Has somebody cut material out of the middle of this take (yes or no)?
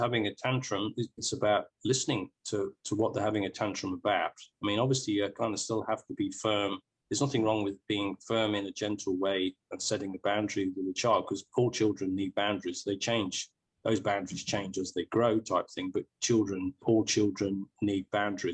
yes